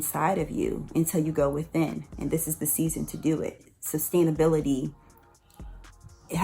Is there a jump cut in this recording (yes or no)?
yes